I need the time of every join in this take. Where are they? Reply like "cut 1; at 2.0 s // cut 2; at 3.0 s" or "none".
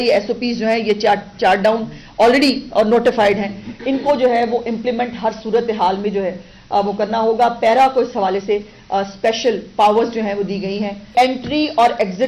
cut 1; at 11.1 s